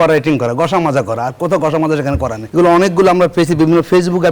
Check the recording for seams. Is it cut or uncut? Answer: cut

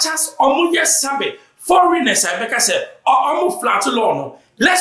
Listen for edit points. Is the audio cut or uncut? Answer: uncut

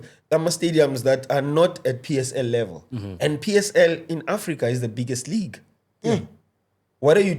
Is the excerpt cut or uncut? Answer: uncut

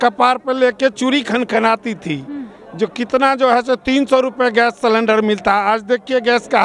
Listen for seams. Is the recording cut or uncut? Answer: uncut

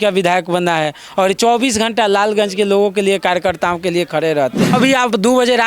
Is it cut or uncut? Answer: cut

